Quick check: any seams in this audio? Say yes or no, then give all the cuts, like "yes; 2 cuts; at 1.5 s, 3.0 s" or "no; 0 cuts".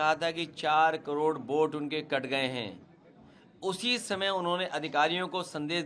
no; 0 cuts